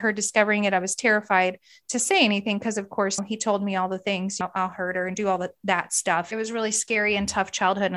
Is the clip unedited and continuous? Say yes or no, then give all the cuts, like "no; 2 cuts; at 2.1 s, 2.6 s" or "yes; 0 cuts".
no; 3 cuts; at 3.2 s, 4.4 s, 6.3 s